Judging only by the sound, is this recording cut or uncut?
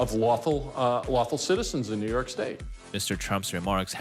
uncut